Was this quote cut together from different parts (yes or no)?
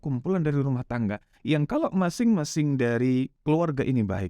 yes